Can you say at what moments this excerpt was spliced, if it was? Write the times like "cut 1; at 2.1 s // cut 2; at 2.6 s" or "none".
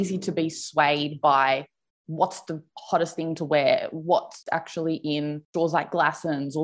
none